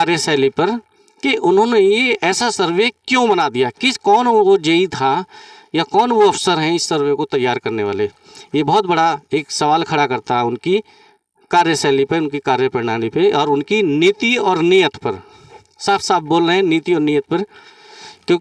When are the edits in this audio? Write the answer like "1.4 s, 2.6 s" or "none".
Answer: none